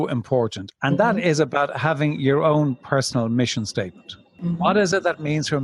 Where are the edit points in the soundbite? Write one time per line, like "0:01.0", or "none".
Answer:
0:04.3